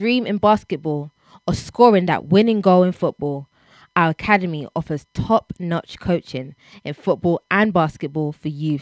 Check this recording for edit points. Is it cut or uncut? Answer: cut